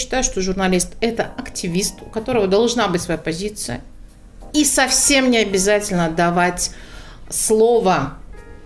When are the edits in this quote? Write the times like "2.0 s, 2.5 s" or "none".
none